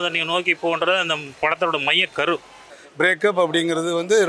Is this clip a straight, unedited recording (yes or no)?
no